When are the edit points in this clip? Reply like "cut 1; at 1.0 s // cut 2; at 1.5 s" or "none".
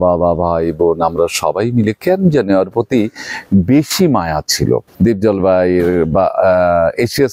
cut 1; at 4.9 s